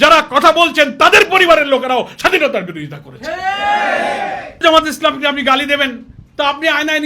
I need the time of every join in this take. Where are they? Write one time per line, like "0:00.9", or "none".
0:04.6